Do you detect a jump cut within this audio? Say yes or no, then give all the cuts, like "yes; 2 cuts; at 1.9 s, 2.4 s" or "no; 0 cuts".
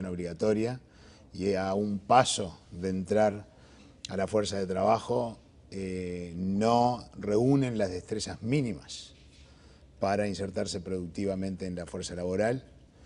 yes; 1 cut; at 11.7 s